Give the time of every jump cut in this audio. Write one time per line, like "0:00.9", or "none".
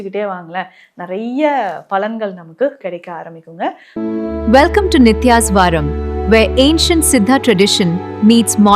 0:03.8